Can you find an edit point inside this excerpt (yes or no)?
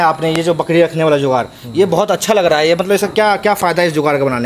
no